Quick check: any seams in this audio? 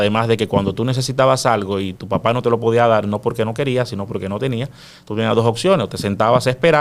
no; 0 cuts

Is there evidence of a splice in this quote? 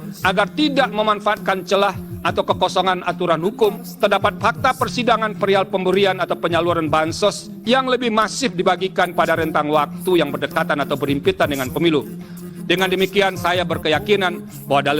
yes; 3 cuts; at 3.9 s, 7.5 s, 12.4 s

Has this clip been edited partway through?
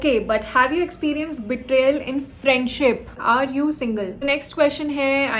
yes; 2 cuts; at 3.1 s, 4.2 s

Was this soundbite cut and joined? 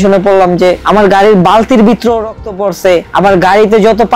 no; 0 cuts

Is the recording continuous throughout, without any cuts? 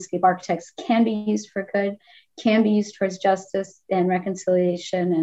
yes; 0 cuts

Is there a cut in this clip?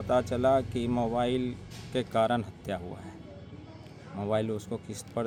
no; 0 cuts

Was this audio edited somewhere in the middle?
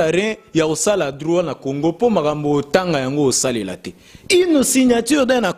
no; 0 cuts

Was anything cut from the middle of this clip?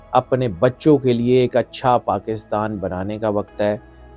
no; 0 cuts

